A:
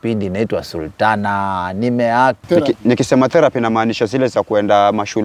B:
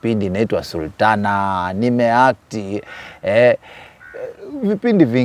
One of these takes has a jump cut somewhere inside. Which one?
A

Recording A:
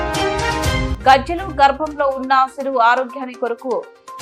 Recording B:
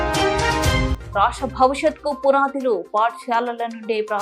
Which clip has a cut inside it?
B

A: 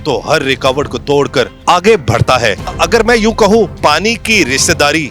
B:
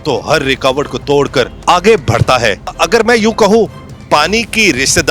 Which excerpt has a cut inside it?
A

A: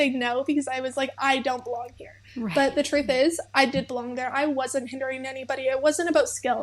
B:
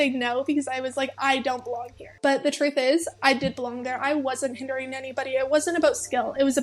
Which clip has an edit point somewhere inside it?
B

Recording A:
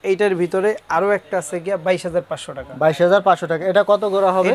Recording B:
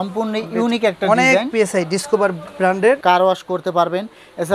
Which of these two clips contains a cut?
B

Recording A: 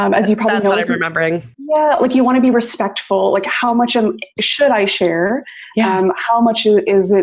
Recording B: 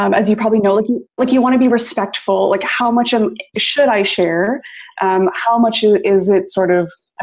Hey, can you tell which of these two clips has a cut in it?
B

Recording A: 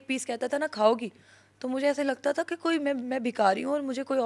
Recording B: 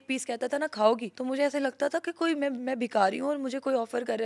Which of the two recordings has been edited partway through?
B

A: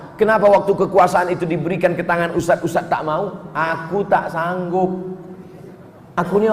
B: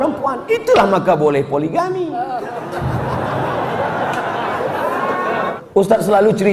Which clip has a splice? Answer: B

